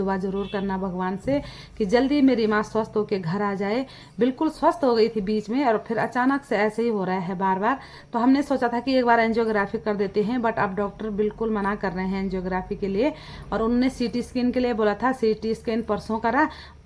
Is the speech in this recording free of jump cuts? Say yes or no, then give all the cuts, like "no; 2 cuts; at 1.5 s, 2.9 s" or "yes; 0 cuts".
yes; 0 cuts